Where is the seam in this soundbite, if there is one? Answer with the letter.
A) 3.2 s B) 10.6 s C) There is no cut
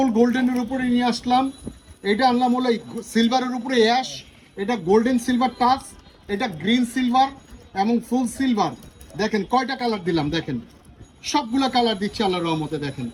C